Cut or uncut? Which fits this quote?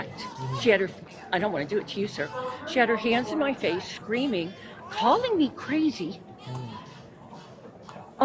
uncut